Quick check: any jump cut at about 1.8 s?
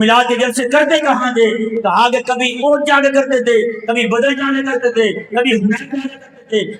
no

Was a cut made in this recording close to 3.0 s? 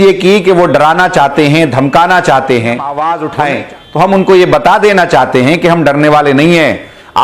yes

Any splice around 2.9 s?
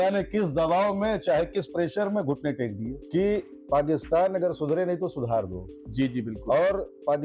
yes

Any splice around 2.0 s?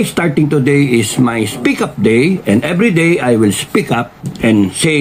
no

